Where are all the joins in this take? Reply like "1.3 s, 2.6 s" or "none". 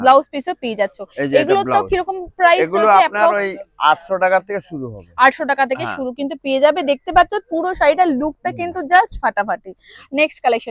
none